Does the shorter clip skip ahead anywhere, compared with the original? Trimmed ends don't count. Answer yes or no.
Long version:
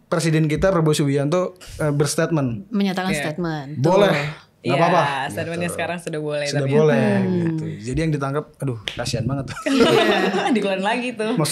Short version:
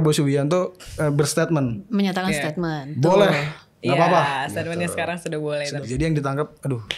yes